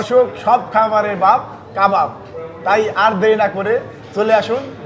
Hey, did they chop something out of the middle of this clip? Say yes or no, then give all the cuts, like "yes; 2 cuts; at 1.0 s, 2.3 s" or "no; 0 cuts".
no; 0 cuts